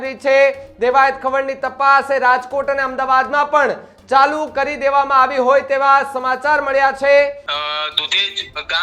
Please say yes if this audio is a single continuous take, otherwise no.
no